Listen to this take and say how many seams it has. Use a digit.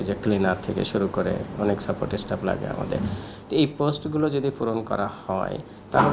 0